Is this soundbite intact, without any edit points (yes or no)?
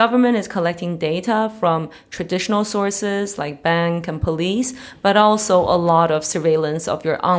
yes